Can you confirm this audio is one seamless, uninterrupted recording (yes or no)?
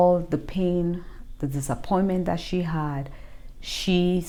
yes